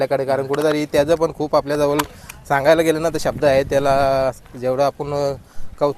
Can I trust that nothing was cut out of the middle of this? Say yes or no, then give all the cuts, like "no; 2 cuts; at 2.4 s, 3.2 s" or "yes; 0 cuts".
yes; 0 cuts